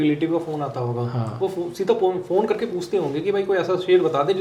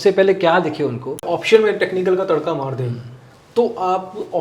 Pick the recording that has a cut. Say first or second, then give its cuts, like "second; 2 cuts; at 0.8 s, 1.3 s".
second; 1 cut; at 1.2 s